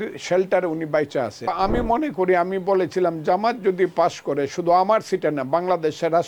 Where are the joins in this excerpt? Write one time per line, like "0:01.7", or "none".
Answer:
0:01.5